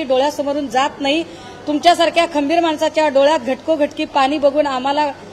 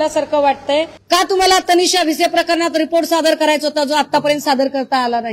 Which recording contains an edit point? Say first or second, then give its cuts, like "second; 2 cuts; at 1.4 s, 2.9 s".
second; 1 cut; at 1.0 s